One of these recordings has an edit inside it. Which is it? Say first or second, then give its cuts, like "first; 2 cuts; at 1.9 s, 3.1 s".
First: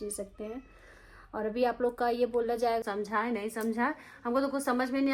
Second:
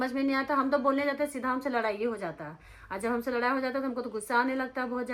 first; 1 cut; at 2.8 s